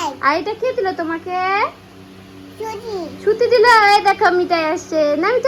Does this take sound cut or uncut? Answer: uncut